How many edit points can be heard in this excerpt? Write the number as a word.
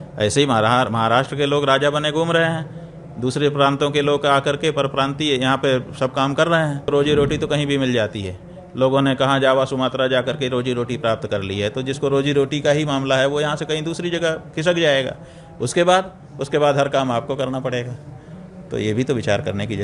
one